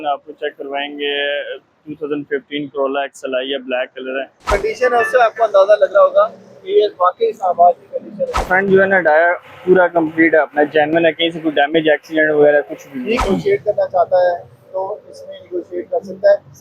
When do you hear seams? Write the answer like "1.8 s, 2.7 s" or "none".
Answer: 4.5 s, 8.5 s, 13.2 s